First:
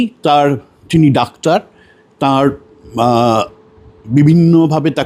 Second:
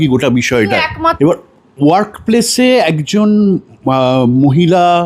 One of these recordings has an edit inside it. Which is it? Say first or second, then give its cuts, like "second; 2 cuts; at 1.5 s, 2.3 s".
second; 1 cut; at 1.1 s